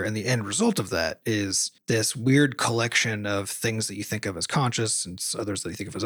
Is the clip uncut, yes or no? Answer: yes